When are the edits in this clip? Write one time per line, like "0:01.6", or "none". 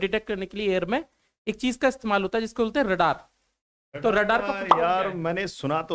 none